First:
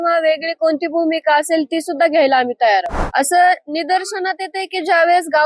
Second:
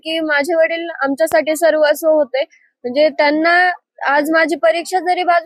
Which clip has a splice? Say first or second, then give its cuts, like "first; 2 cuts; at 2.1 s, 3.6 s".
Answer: first; 1 cut; at 3.0 s